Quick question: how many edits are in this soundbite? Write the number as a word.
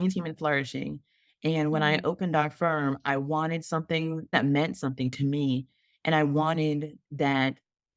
one